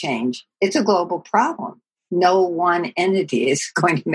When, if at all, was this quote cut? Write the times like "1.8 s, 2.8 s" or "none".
none